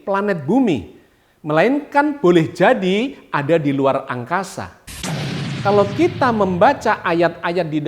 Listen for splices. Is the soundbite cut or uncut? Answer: cut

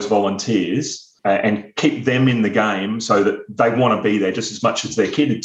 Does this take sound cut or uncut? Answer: cut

